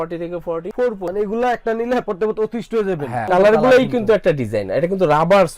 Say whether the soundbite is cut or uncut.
cut